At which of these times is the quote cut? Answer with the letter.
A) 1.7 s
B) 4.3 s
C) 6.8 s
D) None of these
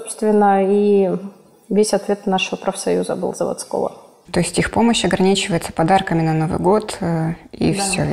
B